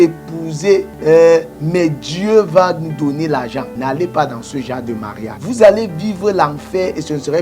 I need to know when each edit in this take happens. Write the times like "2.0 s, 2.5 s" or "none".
0.9 s, 3.7 s, 5.3 s